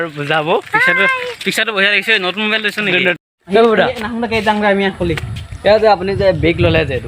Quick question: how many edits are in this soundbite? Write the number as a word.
one